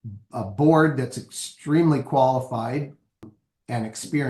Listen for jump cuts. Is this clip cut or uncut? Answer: cut